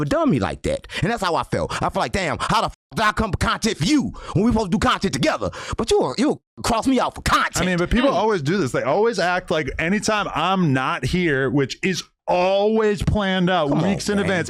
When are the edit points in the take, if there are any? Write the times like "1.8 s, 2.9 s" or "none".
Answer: none